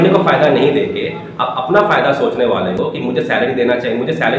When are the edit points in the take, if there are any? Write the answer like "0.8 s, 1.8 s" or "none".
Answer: none

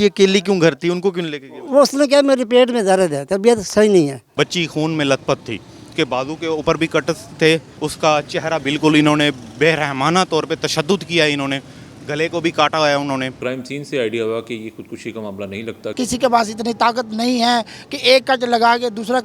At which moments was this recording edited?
4.3 s, 5.8 s, 7.7 s, 13.4 s, 15.9 s

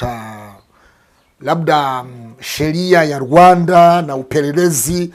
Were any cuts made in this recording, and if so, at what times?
none

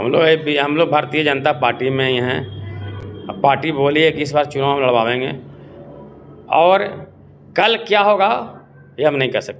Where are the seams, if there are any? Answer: none

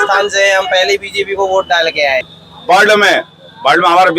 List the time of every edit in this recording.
2.3 s

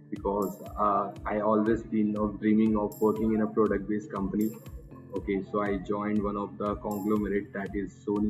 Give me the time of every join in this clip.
none

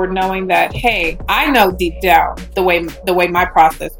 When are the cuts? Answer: 1.1 s, 2.4 s

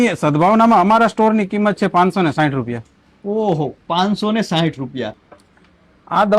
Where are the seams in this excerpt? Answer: 5.2 s

